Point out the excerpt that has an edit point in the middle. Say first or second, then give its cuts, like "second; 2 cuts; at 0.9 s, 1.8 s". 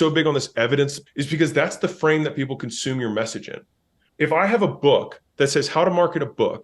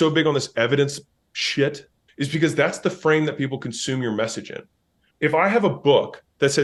first; 1 cut; at 1.1 s